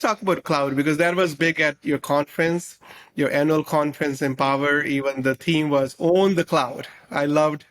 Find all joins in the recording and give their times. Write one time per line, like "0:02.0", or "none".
none